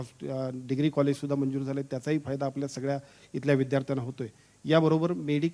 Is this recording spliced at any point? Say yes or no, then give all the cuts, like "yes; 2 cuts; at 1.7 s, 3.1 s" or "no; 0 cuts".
no; 0 cuts